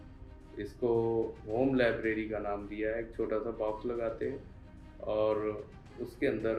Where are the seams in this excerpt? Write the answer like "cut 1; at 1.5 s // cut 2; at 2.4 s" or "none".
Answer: none